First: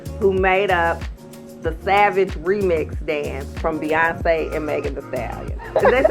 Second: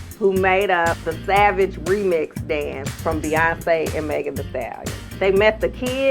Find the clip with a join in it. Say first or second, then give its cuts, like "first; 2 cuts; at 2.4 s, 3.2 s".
second; 2 cuts; at 1.1 s, 5.0 s